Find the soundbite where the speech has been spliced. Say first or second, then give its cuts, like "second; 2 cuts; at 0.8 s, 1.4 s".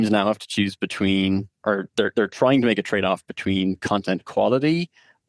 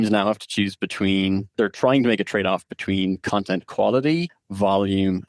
second; 2 cuts; at 1.5 s, 4.4 s